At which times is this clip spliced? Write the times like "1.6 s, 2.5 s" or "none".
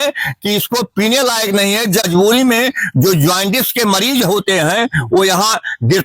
2.1 s